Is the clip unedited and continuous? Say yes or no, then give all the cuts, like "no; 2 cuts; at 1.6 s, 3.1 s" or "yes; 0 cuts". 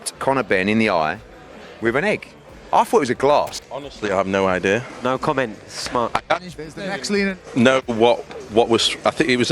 no; 1 cut; at 3.6 s